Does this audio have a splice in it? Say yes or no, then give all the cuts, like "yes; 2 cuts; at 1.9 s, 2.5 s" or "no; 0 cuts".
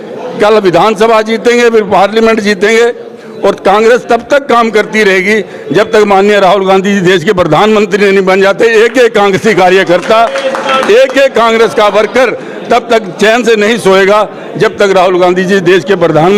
no; 0 cuts